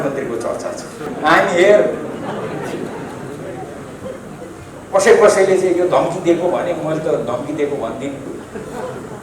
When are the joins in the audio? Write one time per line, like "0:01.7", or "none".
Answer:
0:01.0